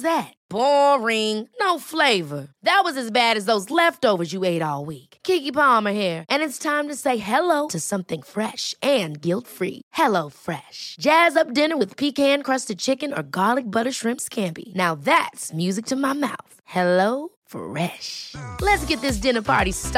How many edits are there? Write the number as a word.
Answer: zero